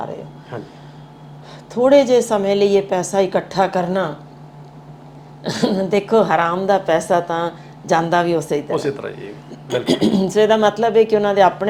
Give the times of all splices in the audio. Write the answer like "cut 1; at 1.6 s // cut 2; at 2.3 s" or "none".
none